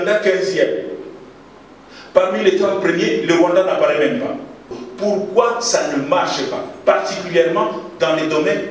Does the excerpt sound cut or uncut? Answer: cut